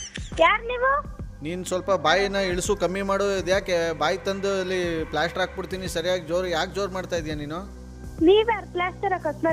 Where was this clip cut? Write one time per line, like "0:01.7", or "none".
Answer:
none